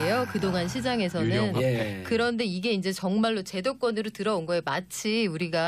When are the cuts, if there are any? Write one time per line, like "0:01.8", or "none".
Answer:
0:01.6